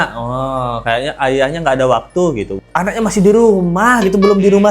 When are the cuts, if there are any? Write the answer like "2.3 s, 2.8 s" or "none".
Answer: 2.6 s